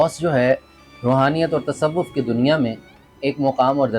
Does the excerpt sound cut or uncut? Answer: uncut